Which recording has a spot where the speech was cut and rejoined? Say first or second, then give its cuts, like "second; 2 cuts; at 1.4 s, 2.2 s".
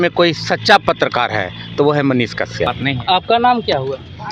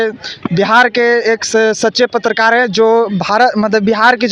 first; 1 cut; at 2.7 s